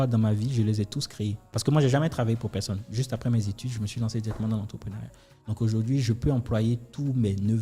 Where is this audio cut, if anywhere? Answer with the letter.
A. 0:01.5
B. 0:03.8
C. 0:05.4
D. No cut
A